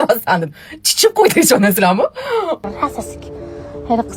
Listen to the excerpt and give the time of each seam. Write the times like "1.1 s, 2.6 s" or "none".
2.6 s